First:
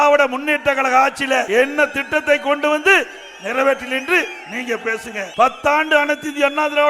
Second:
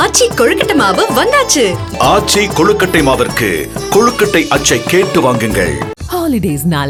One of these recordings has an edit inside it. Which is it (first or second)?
first